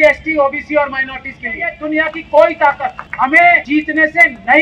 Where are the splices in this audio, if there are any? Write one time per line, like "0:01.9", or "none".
0:01.7
0:03.0
0:03.6